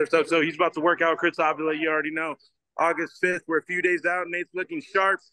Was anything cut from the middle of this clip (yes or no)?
no